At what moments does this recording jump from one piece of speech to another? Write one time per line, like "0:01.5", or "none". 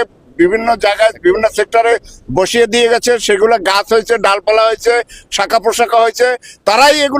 none

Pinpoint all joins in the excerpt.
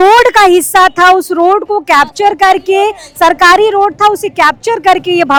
none

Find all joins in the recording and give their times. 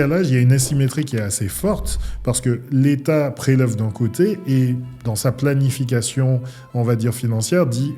none

